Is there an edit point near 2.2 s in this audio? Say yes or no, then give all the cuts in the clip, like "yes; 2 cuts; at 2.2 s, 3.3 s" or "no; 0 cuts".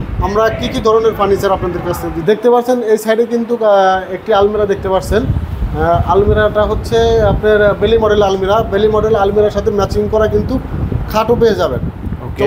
yes; 1 cut; at 2.2 s